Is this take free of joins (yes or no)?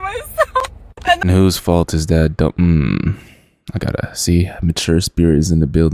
no